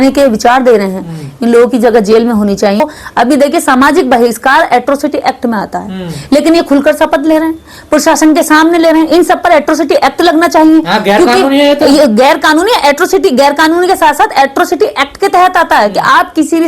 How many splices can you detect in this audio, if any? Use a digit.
1